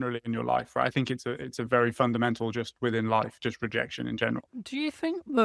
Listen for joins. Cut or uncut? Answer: cut